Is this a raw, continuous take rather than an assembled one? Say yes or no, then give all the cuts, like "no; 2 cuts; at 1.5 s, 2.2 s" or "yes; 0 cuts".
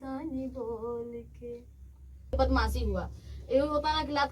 no; 1 cut; at 2.3 s